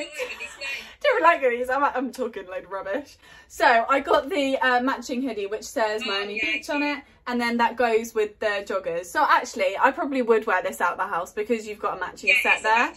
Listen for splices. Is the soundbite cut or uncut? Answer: uncut